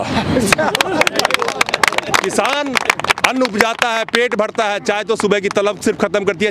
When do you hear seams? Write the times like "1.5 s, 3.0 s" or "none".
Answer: none